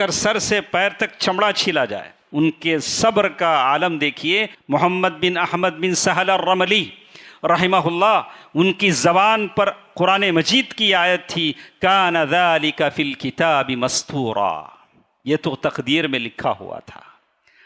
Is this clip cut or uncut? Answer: cut